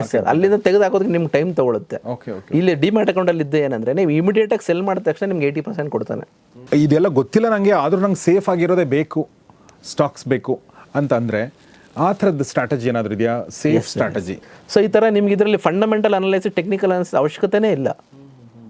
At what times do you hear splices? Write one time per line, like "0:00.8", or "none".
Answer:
0:06.5
0:14.4